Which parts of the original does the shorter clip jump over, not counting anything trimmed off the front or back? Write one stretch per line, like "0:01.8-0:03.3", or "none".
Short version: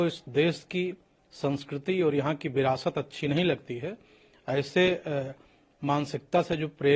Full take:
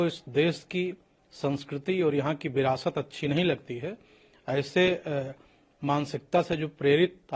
none